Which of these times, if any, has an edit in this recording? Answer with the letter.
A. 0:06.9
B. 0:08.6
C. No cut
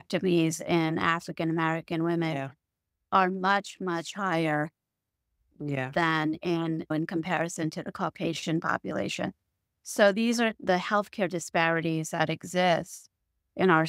A